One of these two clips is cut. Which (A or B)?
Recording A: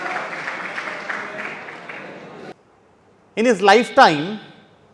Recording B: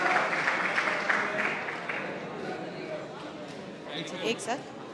A